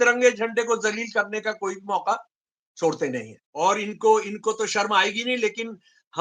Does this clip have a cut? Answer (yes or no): yes